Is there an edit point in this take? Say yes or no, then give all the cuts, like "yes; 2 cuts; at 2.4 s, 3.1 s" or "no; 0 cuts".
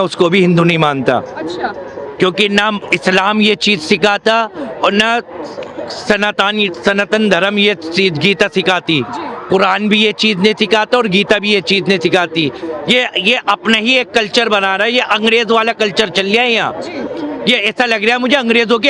no; 0 cuts